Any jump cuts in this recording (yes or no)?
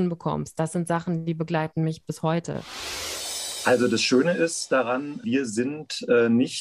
yes